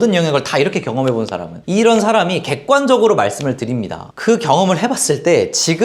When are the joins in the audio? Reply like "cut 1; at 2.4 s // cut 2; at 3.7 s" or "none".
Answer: none

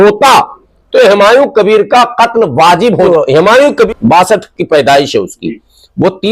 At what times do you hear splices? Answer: cut 1; at 3.1 s // cut 2; at 3.9 s

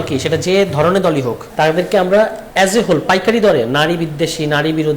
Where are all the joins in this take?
cut 1; at 1.4 s // cut 2; at 2.4 s

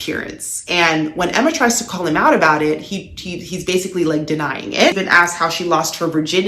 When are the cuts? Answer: cut 1; at 5.0 s

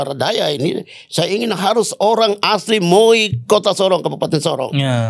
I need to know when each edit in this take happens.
none

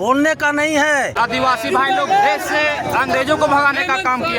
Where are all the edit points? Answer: cut 1; at 1.1 s

